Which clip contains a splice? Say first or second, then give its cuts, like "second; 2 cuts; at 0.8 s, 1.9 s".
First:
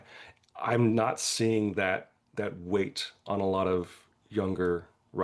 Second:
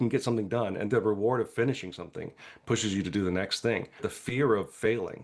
second; 2 cuts; at 0.8 s, 4.1 s